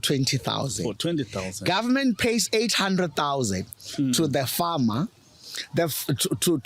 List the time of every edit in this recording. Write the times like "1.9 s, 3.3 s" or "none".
none